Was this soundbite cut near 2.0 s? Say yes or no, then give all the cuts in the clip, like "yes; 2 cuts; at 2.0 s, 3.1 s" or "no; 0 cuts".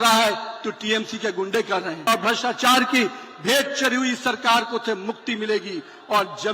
yes; 1 cut; at 2.0 s